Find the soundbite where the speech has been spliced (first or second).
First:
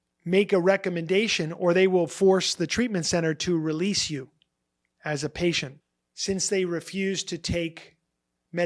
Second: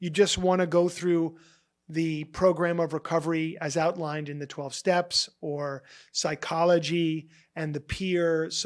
first